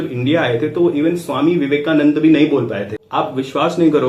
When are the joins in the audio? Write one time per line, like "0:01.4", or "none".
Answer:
0:03.0